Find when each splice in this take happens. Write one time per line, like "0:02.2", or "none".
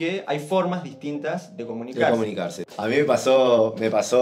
0:02.6